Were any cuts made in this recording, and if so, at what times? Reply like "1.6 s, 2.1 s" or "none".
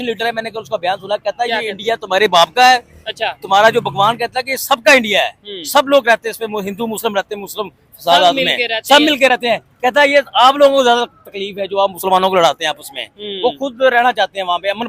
none